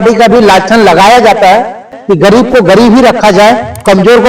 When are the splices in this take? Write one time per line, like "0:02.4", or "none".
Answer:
0:01.9